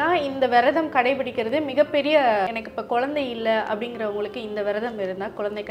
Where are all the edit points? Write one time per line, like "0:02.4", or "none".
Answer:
0:02.5